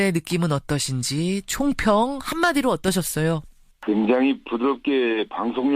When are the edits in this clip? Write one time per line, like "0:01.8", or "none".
0:04.2

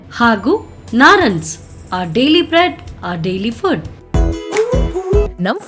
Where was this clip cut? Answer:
0:04.0

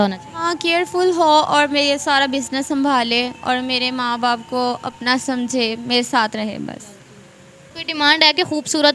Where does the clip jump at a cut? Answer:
0:07.6

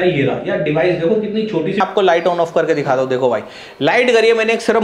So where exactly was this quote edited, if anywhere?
0:01.8

